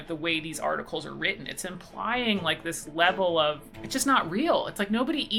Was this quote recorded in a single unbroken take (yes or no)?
no